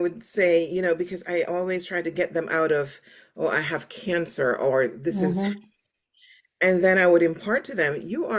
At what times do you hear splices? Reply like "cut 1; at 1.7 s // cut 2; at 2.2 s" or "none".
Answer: none